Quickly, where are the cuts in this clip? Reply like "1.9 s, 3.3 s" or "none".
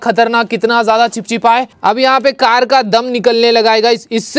1.8 s